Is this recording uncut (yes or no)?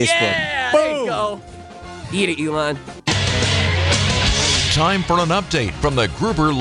no